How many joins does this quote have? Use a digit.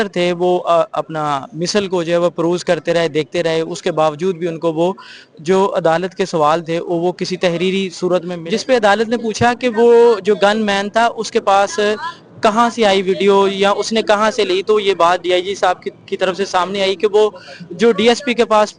1